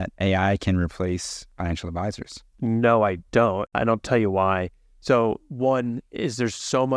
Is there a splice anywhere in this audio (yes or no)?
yes